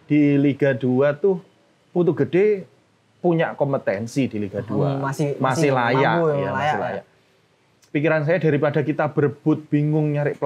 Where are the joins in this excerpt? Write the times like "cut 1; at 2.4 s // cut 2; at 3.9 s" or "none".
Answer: none